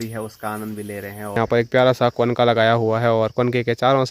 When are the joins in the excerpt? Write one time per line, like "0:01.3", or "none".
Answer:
0:01.4